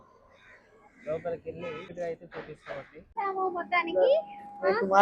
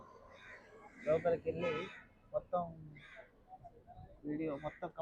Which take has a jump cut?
first; 2 cuts; at 1.9 s, 3.1 s

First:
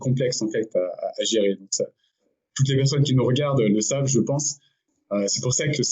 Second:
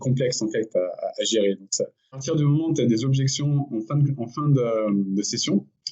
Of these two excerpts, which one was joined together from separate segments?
second; 1 cut; at 2.2 s

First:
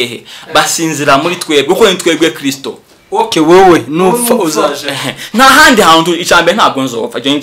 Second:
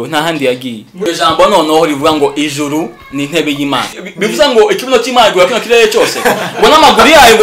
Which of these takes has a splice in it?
second; 2 cuts; at 0.9 s, 4.0 s

